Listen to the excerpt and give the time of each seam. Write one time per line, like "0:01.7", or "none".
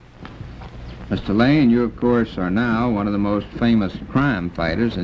0:02.0